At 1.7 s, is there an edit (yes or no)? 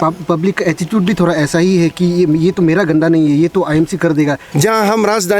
no